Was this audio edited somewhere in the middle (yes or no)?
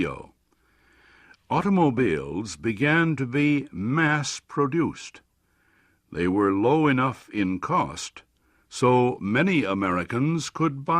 yes